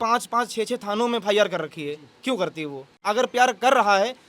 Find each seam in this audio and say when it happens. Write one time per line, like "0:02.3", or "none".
0:03.0